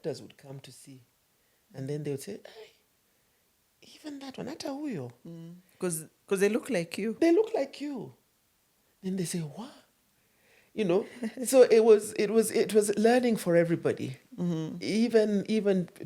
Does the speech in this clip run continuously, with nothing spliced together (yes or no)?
yes